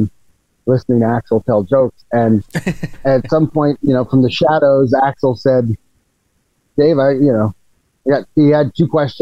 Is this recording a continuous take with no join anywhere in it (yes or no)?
yes